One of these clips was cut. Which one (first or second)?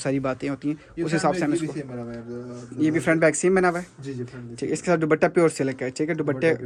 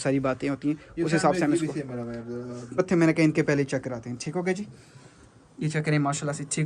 second